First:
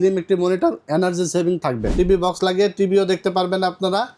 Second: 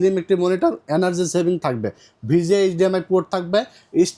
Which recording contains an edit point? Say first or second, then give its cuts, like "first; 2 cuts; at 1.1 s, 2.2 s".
first; 1 cut; at 1.9 s